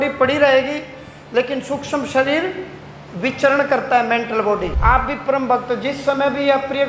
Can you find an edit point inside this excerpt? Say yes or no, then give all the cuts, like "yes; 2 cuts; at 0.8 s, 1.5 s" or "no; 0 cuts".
yes; 1 cut; at 4.7 s